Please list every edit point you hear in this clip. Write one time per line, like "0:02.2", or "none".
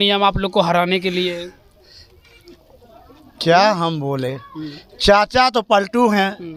none